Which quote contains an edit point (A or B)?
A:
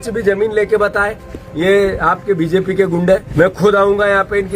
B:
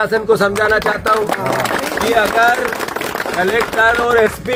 A